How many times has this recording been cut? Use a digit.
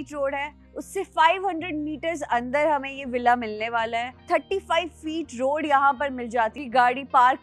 2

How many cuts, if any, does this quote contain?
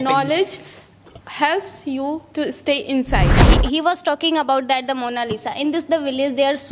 1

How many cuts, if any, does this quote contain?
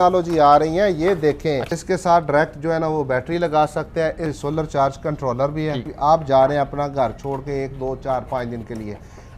3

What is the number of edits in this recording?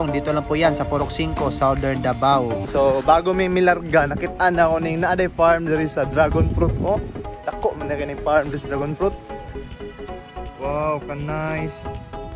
2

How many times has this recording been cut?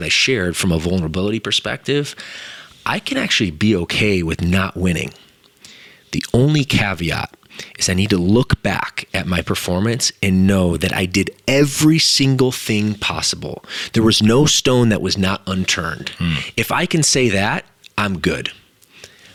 0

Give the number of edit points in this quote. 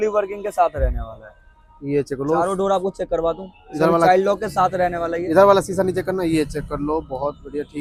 0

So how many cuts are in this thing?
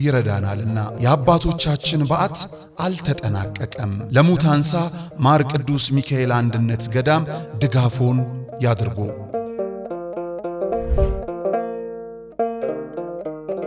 0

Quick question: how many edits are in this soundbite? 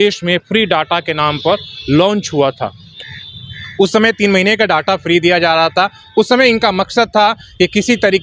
0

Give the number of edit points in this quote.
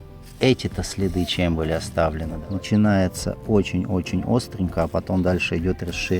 1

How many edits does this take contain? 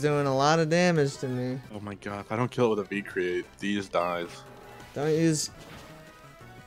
0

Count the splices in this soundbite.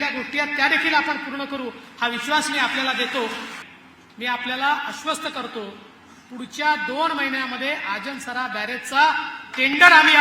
1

